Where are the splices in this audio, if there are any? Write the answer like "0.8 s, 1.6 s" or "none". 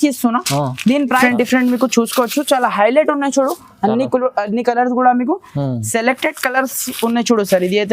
1.2 s